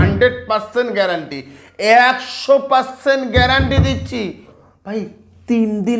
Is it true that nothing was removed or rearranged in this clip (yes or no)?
no